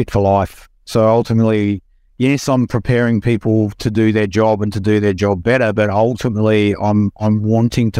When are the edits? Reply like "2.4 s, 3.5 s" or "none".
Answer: none